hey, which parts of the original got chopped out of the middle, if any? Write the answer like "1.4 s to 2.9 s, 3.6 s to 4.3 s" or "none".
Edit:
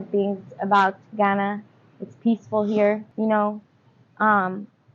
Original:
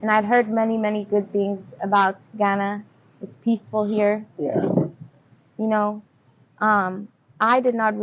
4.3 s to 5.5 s